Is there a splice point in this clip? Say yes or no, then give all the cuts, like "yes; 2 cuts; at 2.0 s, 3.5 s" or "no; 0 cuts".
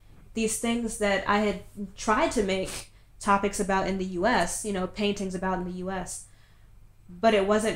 no; 0 cuts